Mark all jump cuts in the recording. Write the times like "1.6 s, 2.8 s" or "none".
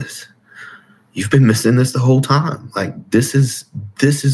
none

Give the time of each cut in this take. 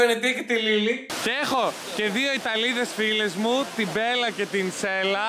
1.1 s

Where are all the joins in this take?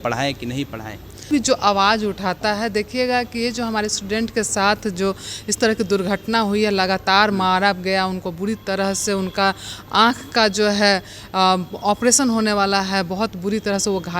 1.3 s

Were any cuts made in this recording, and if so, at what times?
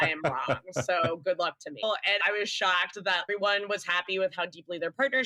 1.8 s, 3.3 s

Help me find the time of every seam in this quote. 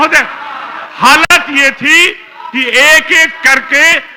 none

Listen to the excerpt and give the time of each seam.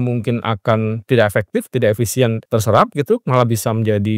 2.4 s

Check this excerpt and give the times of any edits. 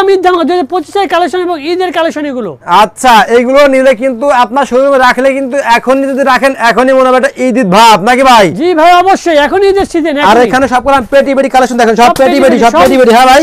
none

